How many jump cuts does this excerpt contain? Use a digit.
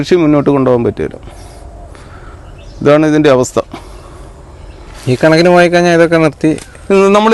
0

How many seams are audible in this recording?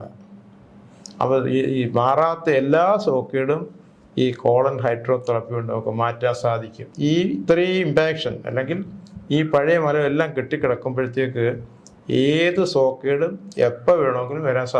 1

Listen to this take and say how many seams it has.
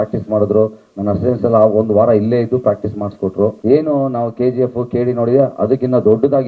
1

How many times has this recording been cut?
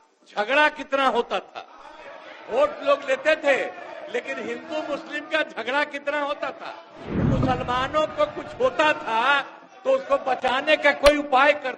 1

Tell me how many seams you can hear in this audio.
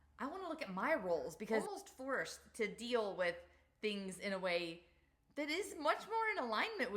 1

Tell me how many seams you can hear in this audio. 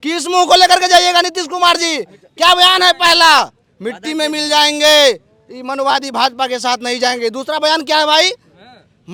0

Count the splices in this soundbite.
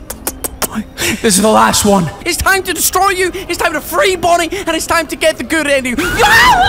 2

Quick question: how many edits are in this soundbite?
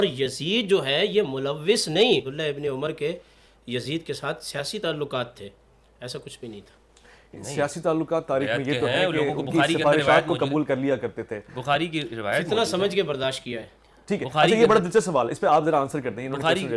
1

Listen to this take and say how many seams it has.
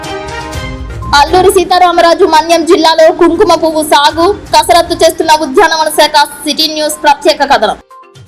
1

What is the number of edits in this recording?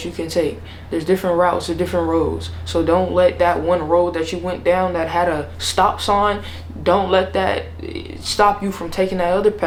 0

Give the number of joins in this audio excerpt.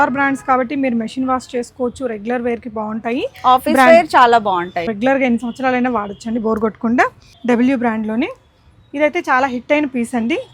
2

